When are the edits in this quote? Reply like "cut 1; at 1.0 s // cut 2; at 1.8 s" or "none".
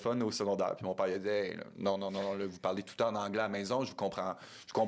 none